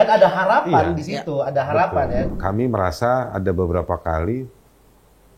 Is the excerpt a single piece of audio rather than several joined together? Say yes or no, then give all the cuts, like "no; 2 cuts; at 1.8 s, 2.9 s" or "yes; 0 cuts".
no; 1 cut; at 2.3 s